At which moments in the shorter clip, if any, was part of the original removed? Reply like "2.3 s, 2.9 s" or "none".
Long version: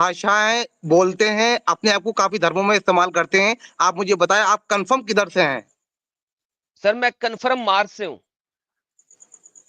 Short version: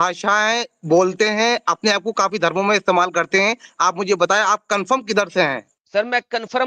5.7 s